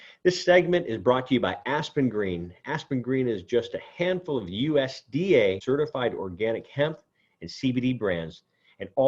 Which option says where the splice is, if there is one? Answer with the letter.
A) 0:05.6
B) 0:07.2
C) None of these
A